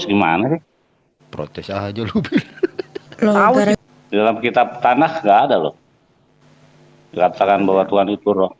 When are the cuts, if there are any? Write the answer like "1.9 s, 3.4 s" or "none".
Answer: 3.8 s